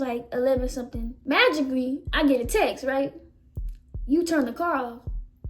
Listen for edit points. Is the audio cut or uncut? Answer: cut